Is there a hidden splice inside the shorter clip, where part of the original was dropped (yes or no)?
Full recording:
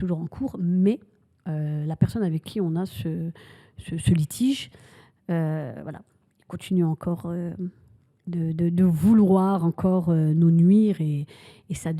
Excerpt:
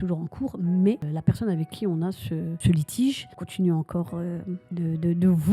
yes